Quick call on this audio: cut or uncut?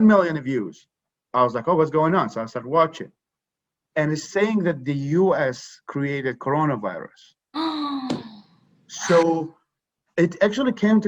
uncut